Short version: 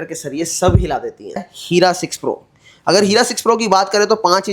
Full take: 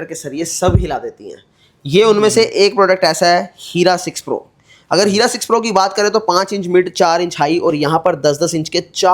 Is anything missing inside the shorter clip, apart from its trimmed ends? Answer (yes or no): yes